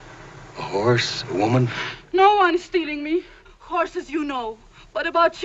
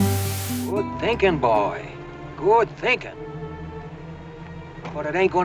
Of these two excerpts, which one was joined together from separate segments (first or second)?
second